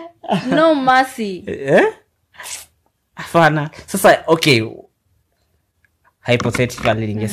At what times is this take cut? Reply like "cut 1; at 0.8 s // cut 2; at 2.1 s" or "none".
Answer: none